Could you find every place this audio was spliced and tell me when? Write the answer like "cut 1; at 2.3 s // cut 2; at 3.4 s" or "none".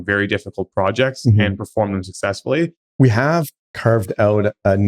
cut 1; at 2.8 s // cut 2; at 3.6 s